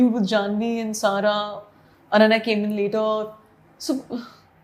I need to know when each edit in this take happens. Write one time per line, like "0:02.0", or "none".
none